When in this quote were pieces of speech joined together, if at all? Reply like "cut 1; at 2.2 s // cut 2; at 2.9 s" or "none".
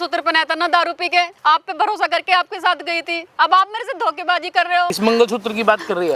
cut 1; at 1.4 s // cut 2; at 5.0 s